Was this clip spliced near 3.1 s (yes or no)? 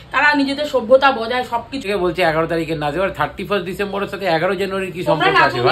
no